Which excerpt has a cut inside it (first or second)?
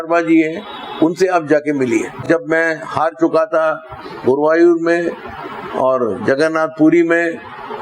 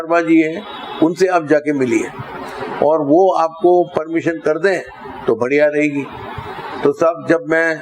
first